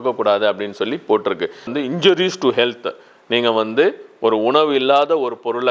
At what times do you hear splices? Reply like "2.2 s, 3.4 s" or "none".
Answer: 1.7 s